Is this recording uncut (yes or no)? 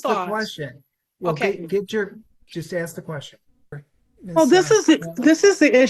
no